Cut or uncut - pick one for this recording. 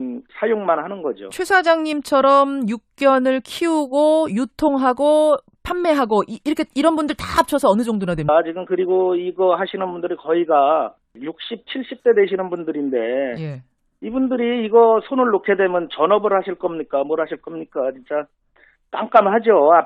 uncut